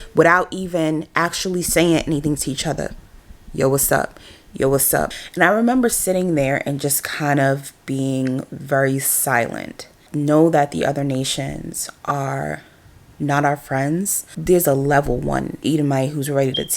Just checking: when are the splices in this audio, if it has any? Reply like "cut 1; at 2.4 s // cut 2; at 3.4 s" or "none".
cut 1; at 5.1 s // cut 2; at 10.0 s // cut 3; at 14.3 s